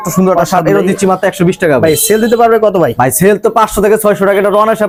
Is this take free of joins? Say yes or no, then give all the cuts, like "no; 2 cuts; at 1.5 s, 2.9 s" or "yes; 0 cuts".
yes; 0 cuts